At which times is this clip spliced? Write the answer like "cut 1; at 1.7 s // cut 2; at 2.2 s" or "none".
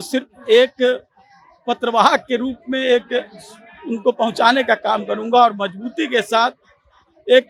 none